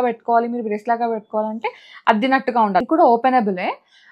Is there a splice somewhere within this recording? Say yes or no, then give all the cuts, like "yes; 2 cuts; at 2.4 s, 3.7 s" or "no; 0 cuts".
yes; 1 cut; at 2.8 s